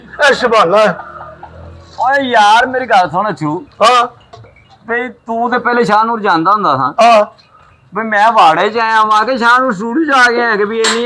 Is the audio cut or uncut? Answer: uncut